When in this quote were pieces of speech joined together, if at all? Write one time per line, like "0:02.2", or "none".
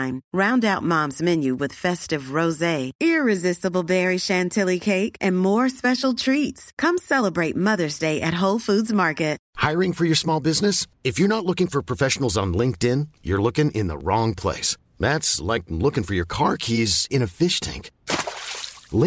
0:09.5